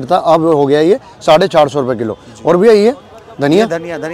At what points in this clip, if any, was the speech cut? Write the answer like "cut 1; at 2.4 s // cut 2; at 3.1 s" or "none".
none